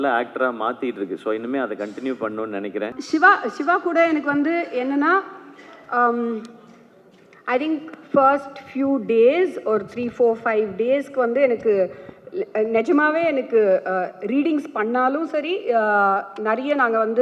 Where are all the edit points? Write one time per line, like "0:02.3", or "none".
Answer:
0:03.0